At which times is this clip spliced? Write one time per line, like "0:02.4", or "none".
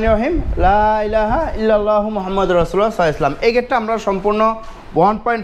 none